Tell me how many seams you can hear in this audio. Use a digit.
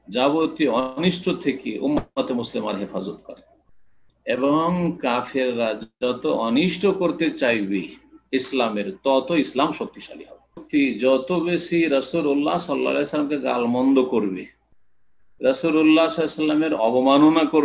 1